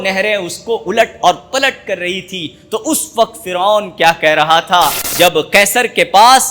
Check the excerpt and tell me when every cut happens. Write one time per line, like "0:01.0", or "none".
0:05.0